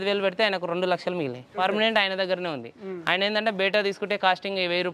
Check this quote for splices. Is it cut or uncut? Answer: cut